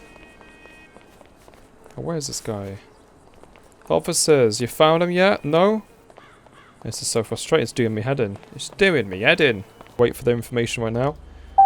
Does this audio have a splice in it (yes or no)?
yes